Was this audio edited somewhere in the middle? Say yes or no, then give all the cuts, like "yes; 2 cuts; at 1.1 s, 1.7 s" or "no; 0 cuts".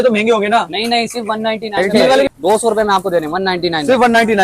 yes; 1 cut; at 2.3 s